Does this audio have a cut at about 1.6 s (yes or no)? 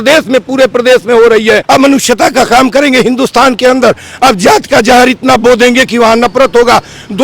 yes